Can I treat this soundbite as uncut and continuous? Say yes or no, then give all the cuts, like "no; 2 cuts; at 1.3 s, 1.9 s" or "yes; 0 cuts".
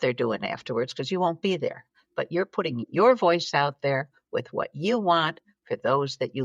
yes; 0 cuts